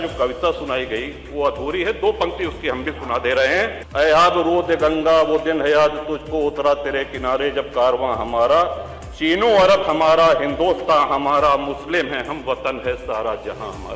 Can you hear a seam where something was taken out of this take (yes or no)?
yes